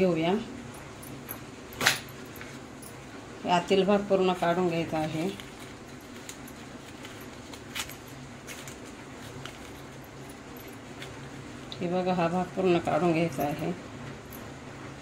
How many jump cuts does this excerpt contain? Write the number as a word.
zero